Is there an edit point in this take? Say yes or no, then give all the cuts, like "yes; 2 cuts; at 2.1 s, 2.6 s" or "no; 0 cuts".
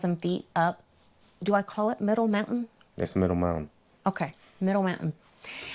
no; 0 cuts